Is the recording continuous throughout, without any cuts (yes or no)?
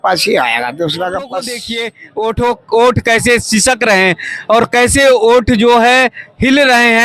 no